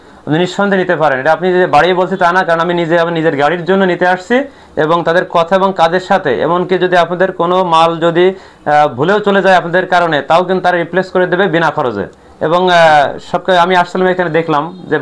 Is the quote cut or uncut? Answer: uncut